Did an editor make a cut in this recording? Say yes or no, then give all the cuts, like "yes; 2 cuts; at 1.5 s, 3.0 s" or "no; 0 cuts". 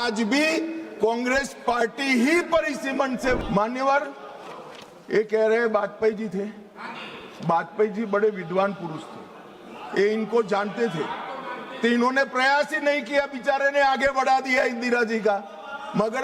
yes; 1 cut; at 3.4 s